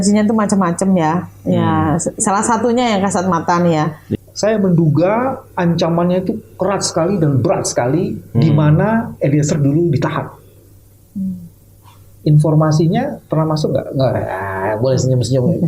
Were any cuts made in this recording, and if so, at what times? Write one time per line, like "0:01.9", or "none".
0:04.0